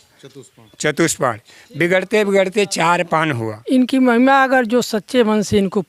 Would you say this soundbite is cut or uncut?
cut